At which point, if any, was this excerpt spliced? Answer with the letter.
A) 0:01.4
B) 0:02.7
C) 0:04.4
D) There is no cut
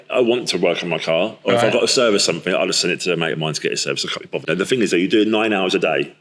C